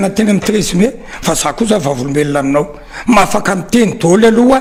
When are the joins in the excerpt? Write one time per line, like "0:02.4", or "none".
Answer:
none